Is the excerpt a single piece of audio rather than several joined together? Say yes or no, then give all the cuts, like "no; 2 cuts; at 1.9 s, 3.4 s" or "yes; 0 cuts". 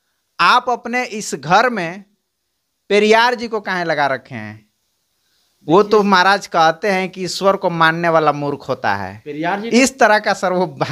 yes; 0 cuts